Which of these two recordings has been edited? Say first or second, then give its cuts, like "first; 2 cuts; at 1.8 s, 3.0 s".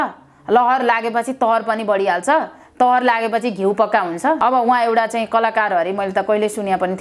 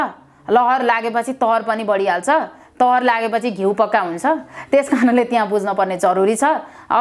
first; 1 cut; at 4.4 s